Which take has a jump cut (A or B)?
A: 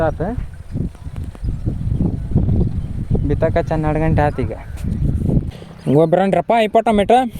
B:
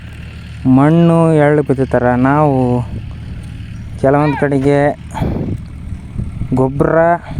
A